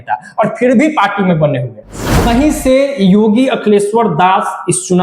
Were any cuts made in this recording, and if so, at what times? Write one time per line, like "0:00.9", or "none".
0:02.2